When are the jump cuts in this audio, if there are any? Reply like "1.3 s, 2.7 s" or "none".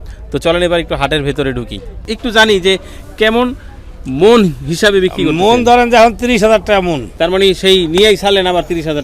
2.0 s, 7.0 s